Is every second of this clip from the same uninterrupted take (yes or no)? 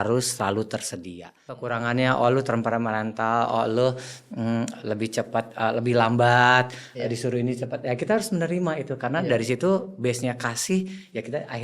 no